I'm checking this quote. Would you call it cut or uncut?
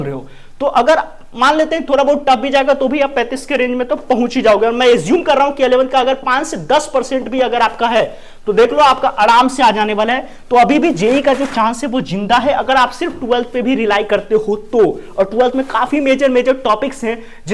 uncut